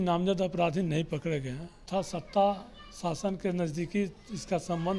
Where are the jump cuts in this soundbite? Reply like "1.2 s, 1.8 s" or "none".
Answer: 1.9 s

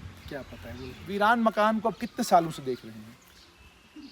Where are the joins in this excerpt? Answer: 1.0 s

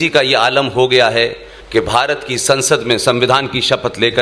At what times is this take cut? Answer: none

